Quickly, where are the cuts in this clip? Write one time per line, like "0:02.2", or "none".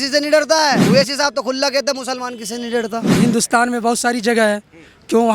0:00.8
0:03.1